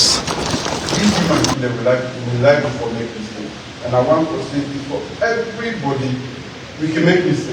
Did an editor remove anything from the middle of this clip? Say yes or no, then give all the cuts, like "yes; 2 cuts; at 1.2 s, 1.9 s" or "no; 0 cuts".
yes; 1 cut; at 0.9 s